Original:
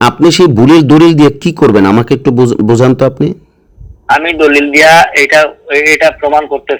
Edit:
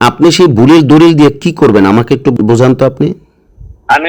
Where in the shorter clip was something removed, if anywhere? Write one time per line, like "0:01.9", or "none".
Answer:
0:02.3